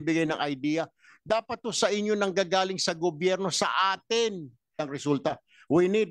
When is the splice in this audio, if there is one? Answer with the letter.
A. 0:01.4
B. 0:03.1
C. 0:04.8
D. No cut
C